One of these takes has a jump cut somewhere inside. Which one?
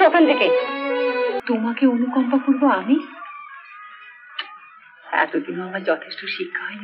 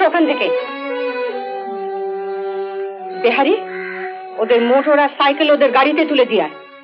first; 1 cut; at 1.4 s

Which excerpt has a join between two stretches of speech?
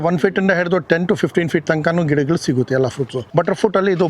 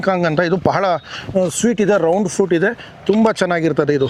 first; 1 cut; at 3.2 s

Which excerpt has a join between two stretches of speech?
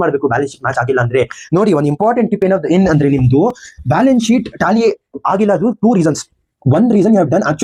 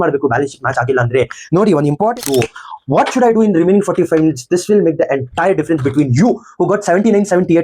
second; 1 cut; at 2.2 s

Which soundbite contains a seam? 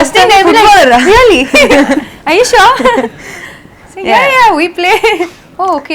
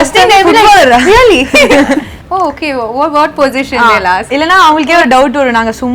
second; 1 cut; at 2.1 s

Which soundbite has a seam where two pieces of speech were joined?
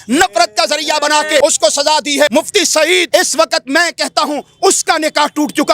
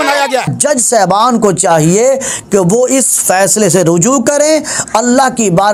first; 1 cut; at 2.3 s

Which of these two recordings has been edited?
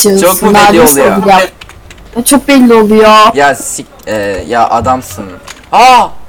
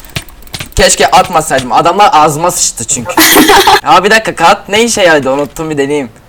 second; 1 cut; at 3.8 s

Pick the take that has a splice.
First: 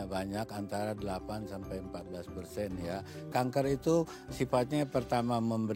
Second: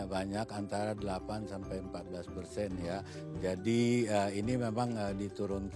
first; 1 cut; at 3.3 s

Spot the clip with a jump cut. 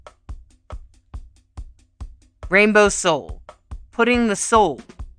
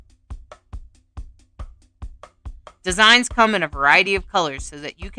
second; 1 cut; at 2.5 s

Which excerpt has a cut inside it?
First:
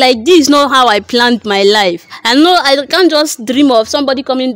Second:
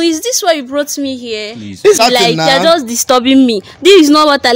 second; 1 cut; at 2.0 s

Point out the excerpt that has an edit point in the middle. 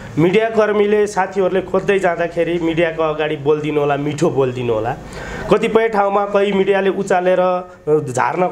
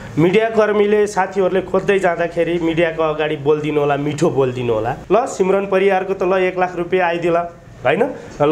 second; 1 cut; at 5.0 s

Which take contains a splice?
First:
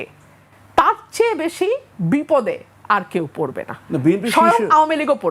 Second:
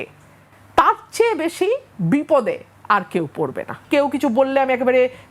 second; 1 cut; at 3.8 s

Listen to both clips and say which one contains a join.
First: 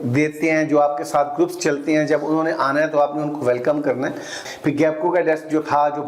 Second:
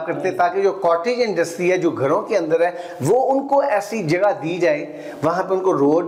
first; 1 cut; at 4.4 s

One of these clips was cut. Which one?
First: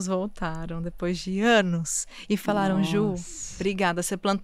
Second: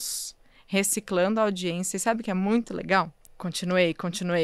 second; 1 cut; at 3.2 s

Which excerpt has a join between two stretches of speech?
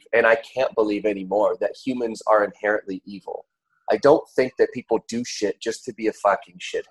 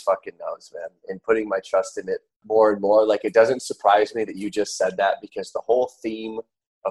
second; 1 cut; at 2.3 s

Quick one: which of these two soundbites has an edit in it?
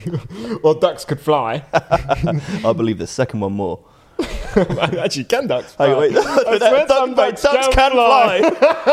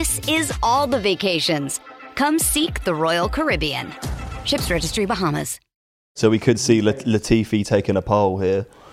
second; 1 cut; at 5.9 s

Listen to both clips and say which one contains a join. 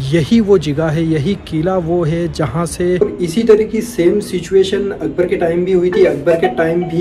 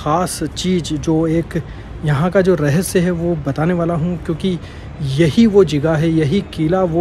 first; 1 cut; at 3.1 s

